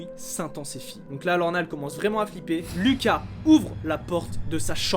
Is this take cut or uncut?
cut